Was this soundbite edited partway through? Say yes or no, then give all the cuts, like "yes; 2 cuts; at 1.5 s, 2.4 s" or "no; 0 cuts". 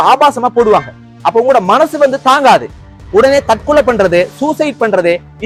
no; 0 cuts